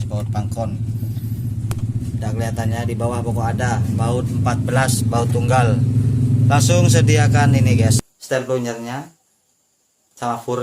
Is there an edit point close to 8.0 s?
yes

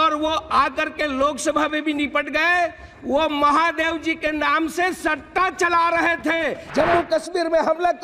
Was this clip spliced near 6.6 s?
yes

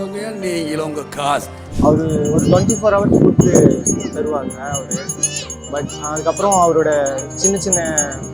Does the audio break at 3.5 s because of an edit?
no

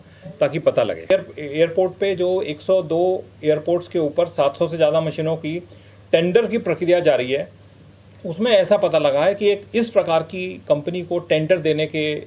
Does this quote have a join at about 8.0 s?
no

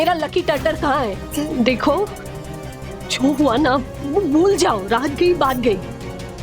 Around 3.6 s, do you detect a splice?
no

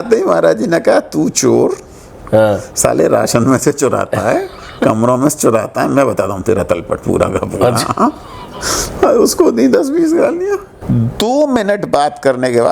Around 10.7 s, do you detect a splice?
yes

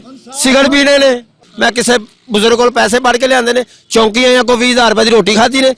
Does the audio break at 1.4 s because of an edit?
yes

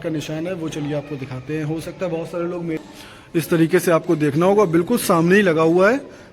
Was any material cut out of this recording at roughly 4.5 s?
no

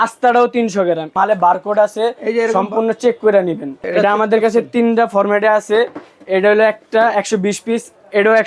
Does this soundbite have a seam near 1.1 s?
yes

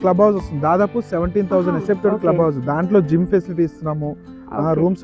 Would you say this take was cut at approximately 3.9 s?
no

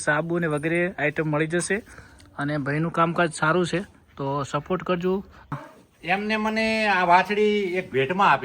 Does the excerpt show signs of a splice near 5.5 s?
yes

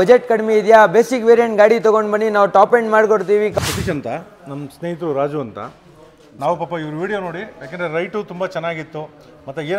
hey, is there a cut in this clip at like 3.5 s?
yes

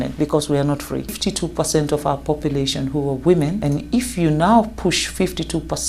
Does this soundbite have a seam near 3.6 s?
yes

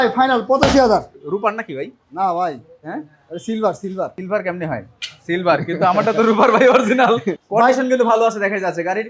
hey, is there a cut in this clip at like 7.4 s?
yes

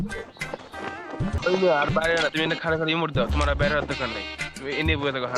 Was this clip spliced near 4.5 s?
yes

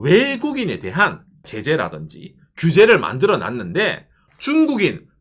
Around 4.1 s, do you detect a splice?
yes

